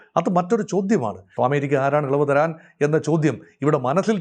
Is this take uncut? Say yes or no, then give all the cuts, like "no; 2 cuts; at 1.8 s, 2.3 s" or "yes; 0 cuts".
no; 1 cut; at 1.3 s